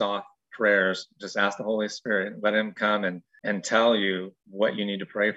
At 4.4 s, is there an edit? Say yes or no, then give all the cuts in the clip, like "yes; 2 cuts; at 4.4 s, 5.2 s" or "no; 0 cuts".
yes; 2 cuts; at 3.3 s, 4.4 s